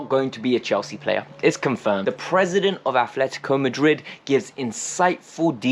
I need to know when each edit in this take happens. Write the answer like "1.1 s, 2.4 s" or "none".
2.0 s